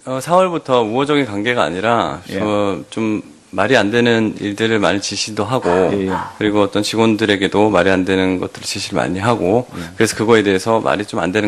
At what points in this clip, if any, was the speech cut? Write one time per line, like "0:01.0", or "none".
none